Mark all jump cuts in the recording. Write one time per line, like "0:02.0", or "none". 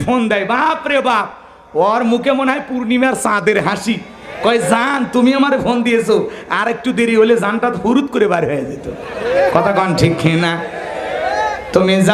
none